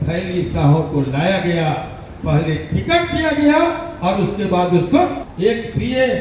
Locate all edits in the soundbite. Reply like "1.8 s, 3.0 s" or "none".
5.2 s